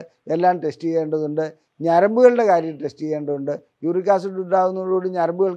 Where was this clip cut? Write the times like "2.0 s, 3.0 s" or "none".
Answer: none

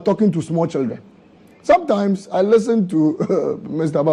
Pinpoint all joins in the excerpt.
none

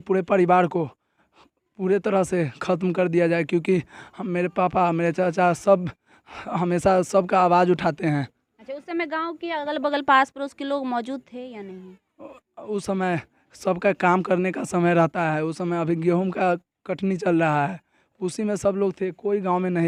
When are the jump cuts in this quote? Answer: none

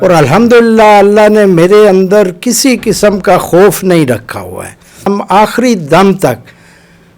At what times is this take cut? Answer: 5.1 s

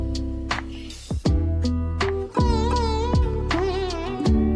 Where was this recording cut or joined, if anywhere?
none

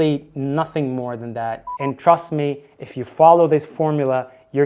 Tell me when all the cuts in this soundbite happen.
1.6 s

